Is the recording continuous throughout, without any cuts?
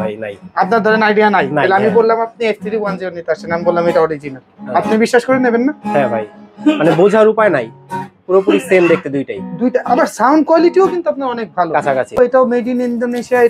no; 1 cut; at 12.1 s

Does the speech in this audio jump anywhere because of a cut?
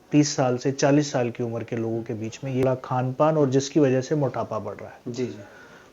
yes; 1 cut; at 2.6 s

